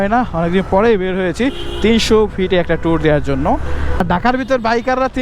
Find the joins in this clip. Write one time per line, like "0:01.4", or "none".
0:04.0

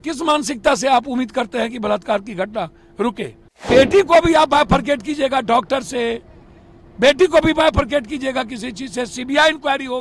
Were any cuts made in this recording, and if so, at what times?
0:03.6

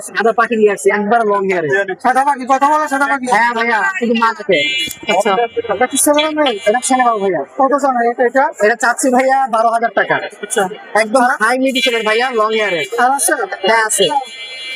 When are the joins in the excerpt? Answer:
none

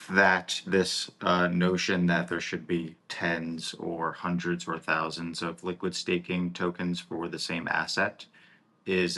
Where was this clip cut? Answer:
0:03.0

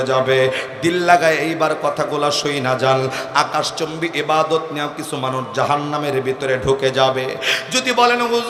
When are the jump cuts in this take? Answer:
none

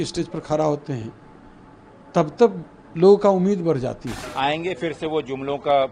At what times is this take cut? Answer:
0:04.2

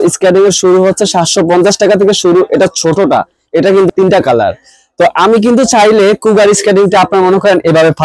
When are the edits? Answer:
0:03.9

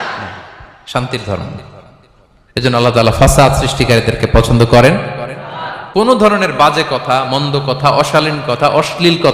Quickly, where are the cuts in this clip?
0:06.0

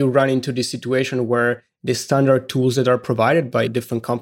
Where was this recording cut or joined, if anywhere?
none

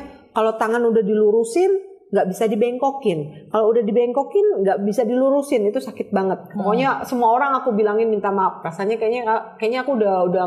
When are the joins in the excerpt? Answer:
0:06.5

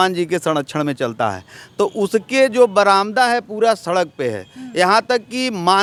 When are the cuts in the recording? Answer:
none

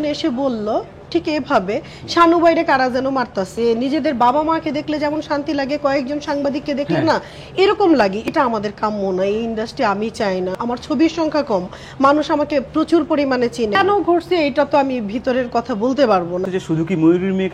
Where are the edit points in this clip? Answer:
0:03.5
0:08.2
0:10.5
0:13.8
0:16.5

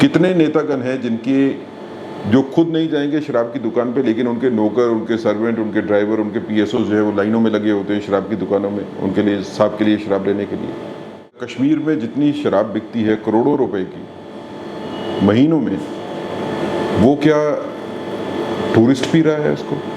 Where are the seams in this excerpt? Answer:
0:11.4

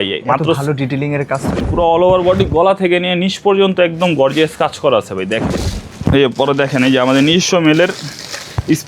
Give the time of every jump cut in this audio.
0:01.6
0:05.6

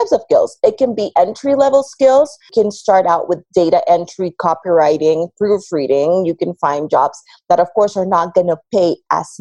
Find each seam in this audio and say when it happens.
0:02.4

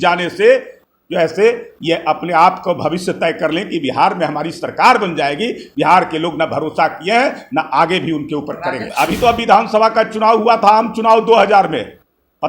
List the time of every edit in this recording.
0:08.9

